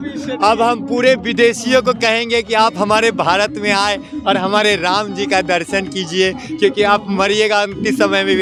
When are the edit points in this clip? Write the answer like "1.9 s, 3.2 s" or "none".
none